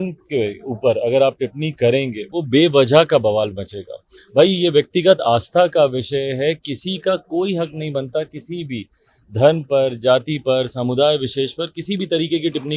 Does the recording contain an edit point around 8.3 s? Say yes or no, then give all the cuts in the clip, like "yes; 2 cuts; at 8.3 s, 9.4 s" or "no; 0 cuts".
no; 0 cuts